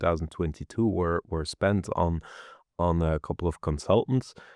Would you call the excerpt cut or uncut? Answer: uncut